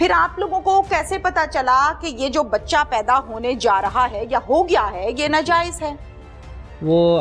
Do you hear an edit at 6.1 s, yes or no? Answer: no